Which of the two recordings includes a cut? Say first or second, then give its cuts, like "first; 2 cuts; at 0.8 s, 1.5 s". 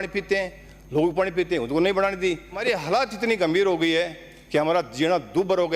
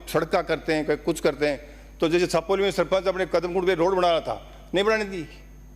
first; 1 cut; at 2.6 s